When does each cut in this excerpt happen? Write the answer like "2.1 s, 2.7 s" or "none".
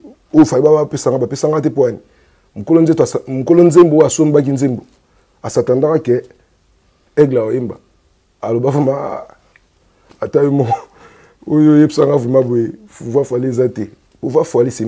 none